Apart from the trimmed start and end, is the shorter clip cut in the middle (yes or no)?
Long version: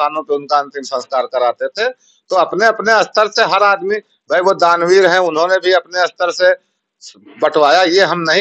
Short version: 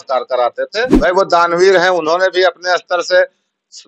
yes